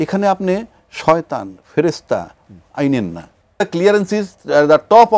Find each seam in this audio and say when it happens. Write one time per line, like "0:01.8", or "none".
0:03.6